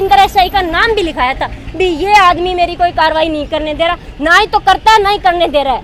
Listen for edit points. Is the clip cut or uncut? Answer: uncut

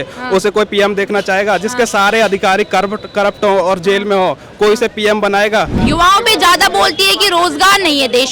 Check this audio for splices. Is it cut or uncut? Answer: cut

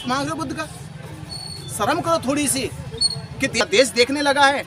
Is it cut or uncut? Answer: cut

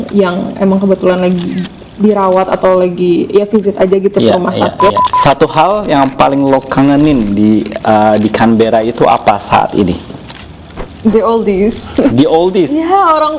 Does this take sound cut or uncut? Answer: cut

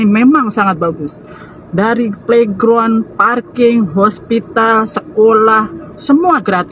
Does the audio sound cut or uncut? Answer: uncut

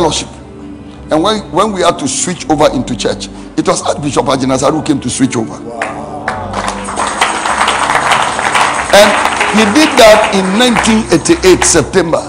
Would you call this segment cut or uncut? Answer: uncut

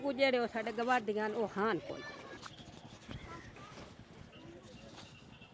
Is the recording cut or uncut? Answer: cut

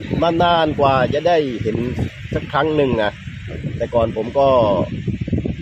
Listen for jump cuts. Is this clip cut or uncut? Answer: uncut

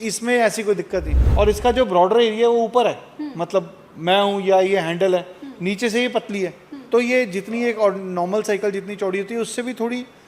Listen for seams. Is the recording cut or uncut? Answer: cut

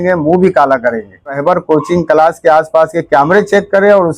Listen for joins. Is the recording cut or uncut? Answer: cut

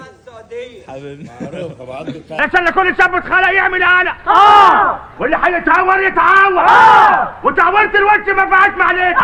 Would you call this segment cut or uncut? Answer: uncut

